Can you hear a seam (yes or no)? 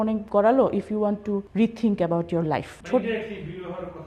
yes